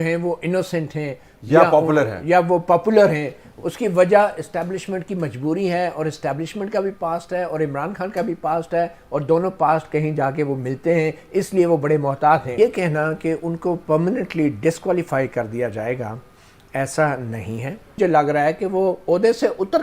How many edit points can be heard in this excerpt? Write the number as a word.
two